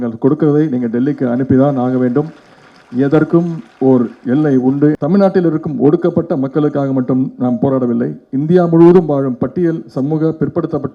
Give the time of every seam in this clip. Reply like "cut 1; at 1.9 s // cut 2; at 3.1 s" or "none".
cut 1; at 5.0 s